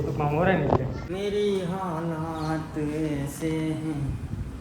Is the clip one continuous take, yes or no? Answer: no